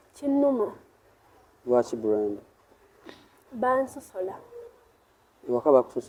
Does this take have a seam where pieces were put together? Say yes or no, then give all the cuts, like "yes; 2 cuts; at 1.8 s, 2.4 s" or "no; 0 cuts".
no; 0 cuts